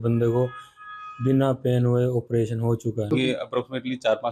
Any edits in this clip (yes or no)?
yes